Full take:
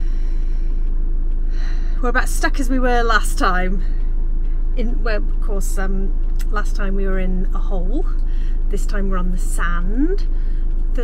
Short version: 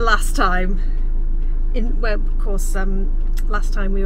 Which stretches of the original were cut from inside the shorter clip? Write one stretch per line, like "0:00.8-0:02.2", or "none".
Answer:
none